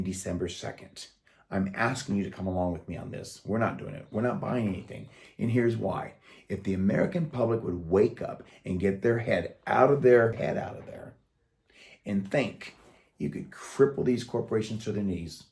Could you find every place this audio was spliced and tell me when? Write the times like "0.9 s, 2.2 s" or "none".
10.4 s